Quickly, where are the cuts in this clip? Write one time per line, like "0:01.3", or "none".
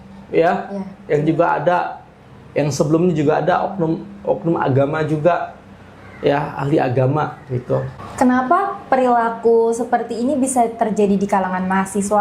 0:08.0